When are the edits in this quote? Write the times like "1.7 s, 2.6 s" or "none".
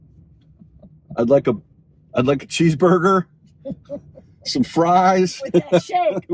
none